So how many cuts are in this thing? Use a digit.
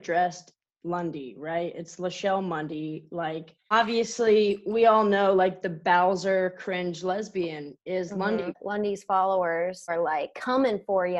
3